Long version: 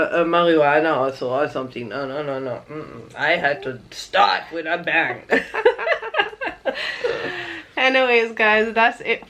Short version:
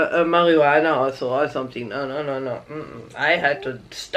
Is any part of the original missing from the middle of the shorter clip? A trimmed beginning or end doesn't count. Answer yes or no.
no